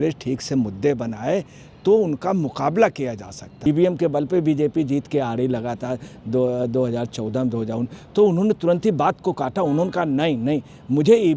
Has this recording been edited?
yes; 1 cut; at 3.5 s

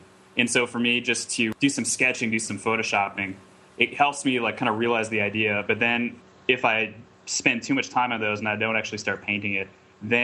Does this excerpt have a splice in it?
yes; 1 cut; at 1.6 s

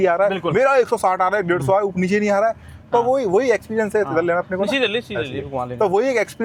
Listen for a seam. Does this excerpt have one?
no; 0 cuts

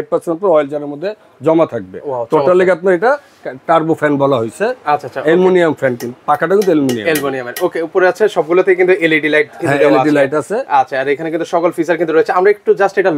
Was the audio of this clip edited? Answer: no; 0 cuts

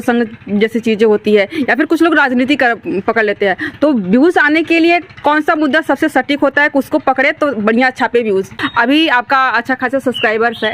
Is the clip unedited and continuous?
no; 1 cut; at 8.6 s

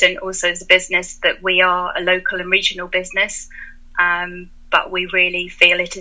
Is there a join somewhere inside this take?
no; 0 cuts

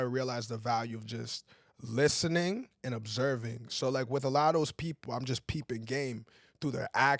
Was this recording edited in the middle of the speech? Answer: no; 0 cuts

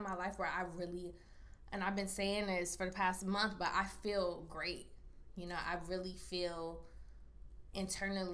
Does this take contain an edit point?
no; 0 cuts

